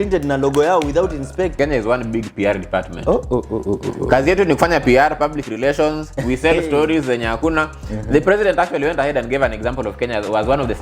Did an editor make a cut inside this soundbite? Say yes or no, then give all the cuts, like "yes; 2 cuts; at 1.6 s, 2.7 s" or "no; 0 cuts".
yes; 1 cut; at 1.5 s